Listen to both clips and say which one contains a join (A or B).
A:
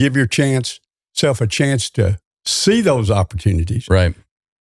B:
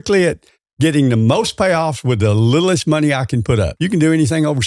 B